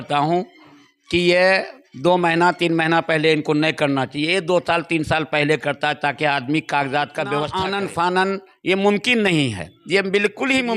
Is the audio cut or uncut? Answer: cut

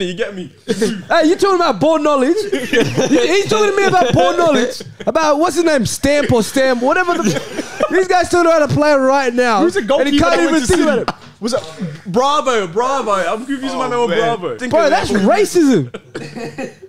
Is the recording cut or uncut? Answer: cut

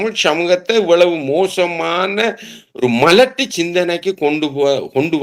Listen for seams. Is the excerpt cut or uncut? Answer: uncut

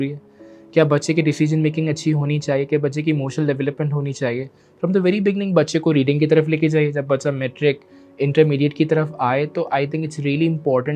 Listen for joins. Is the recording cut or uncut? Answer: uncut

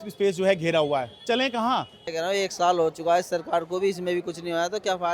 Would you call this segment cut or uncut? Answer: cut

